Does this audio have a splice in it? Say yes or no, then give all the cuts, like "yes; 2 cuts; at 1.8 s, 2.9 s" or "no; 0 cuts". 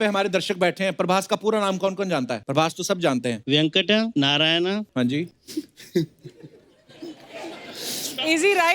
yes; 4 cuts; at 2.4 s, 3.4 s, 4.1 s, 5.2 s